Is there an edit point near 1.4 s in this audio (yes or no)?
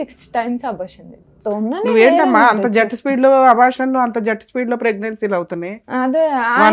yes